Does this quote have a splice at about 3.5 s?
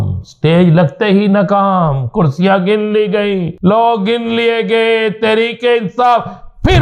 yes; 1 cut; at 3.5 s

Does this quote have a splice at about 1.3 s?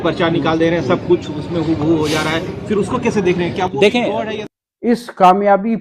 no; 1 cut; at 4.4 s

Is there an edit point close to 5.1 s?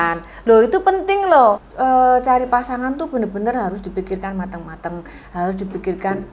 no; 1 cut; at 1.7 s

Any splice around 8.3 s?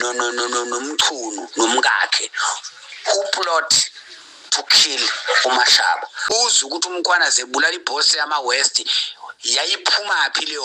no; 1 cut; at 6.3 s

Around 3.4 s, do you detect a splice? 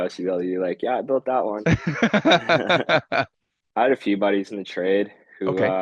yes; 1 cut; at 3.4 s

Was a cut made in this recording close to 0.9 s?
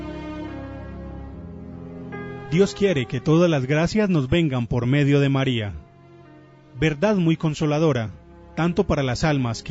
no; 1 cut; at 2.5 s

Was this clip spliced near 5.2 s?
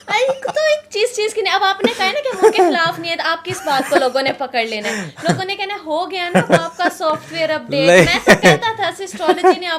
no; 0 cuts

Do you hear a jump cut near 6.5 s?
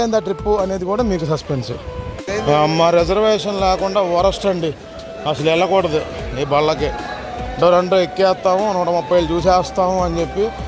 no; 1 cut; at 2.3 s

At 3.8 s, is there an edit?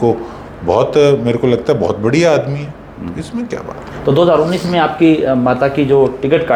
no; 0 cuts

